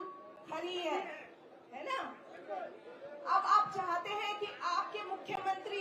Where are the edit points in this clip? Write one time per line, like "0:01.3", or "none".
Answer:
none